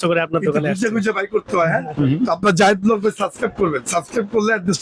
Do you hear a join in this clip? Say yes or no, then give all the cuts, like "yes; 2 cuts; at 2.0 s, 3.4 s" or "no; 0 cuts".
no; 0 cuts